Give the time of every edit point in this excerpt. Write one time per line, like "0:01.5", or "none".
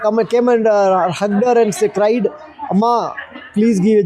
none